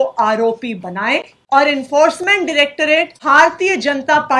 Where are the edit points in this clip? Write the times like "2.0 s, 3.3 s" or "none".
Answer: 1.3 s, 3.2 s